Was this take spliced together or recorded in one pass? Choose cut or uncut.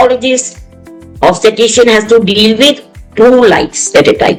uncut